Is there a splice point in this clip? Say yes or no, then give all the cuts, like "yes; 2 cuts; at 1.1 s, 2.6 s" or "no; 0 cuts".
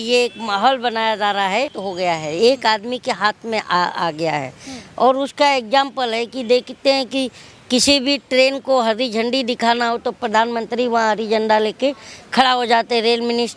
yes; 1 cut; at 1.8 s